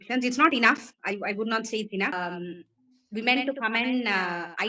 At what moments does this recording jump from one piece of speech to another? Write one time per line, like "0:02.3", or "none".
0:02.2